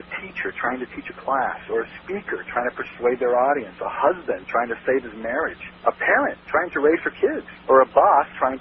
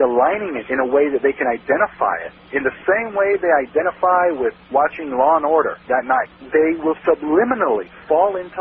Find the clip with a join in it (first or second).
second